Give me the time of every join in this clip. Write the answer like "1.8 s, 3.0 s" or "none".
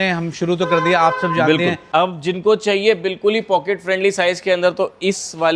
1.8 s